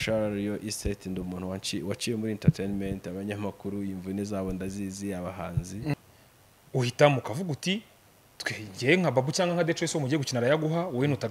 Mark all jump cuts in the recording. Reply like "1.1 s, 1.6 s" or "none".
5.9 s